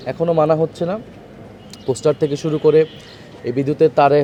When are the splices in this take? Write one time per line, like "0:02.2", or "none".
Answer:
none